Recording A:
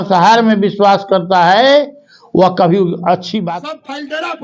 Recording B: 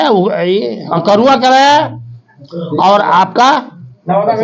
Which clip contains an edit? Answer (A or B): A